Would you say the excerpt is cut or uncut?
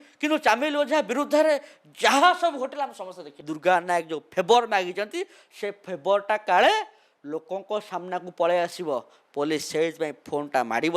cut